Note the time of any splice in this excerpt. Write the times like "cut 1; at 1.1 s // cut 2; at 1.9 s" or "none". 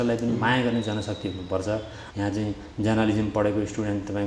cut 1; at 2.0 s